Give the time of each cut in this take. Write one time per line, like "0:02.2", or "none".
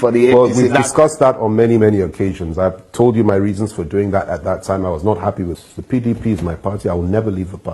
0:05.6